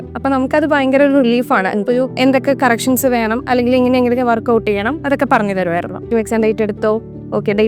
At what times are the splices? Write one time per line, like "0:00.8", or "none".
0:02.1
0:06.1